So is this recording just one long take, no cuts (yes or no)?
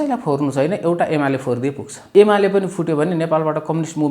no